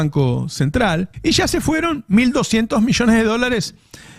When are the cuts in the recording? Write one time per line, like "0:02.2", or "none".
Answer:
0:01.1